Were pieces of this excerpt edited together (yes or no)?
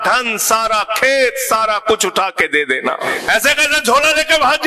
yes